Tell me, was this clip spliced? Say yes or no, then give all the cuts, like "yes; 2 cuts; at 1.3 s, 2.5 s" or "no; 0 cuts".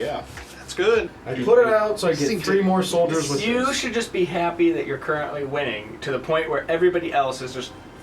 yes; 1 cut; at 1.2 s